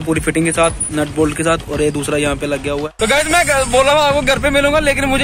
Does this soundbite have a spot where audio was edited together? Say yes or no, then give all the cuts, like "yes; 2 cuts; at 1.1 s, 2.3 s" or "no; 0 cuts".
yes; 1 cut; at 2.9 s